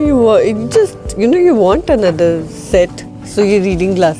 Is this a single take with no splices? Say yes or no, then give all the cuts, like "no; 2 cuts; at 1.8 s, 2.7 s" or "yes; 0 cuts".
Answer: yes; 0 cuts